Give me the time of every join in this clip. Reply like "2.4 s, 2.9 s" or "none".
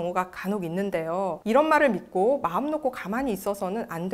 1.4 s